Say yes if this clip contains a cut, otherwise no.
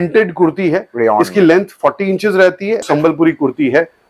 yes